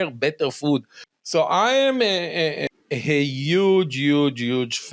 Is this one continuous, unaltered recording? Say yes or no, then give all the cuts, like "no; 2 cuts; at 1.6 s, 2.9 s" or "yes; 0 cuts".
no; 2 cuts; at 1.0 s, 2.6 s